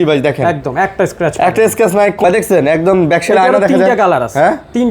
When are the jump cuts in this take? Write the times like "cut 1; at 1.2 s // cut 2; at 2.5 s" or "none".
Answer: cut 1; at 2.2 s